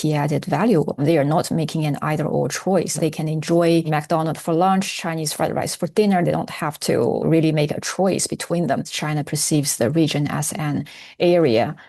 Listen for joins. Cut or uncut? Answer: cut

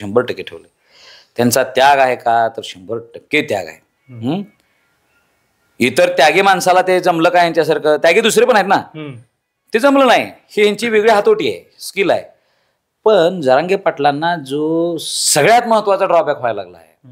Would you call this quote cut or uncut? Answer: uncut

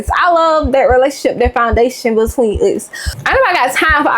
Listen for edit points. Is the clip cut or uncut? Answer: cut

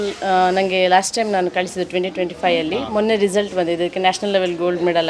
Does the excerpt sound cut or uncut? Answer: uncut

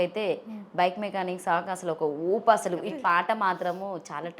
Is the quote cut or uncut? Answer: cut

